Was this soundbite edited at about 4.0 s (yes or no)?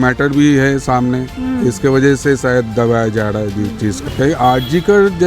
yes